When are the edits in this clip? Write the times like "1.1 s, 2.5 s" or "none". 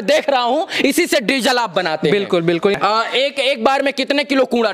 2.8 s